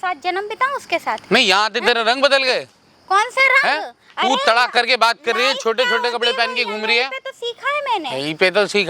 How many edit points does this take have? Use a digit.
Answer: 0